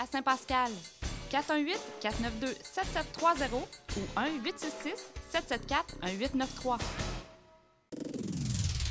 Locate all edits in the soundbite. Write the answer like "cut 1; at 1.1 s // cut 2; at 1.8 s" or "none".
cut 1; at 8.0 s